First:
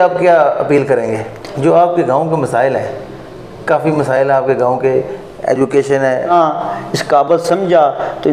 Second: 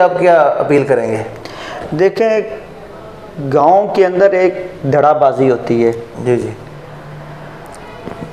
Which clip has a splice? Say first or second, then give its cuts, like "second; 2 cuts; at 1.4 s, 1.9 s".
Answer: first; 2 cuts; at 1.4 s, 6.3 s